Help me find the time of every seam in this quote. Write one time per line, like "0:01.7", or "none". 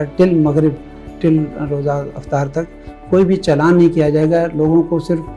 none

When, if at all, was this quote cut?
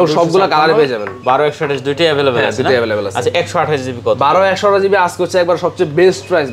none

